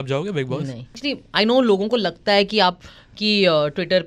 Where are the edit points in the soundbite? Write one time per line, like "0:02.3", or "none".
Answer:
0:01.0

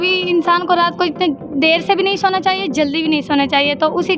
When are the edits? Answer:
none

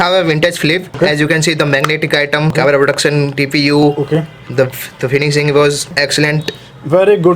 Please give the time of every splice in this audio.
0:00.9
0:02.5
0:06.0

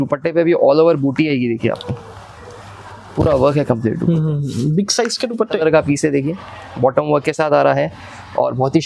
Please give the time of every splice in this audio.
0:05.6

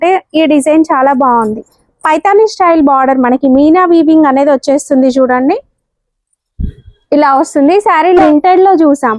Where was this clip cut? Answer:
0:08.2

